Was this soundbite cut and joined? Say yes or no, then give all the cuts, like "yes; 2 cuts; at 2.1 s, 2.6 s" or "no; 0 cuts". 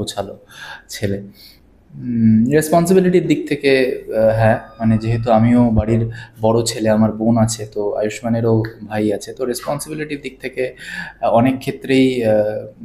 no; 0 cuts